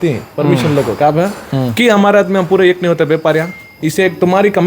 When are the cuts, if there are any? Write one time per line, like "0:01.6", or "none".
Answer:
0:03.7